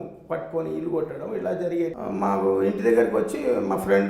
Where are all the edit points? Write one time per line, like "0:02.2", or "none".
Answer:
0:02.0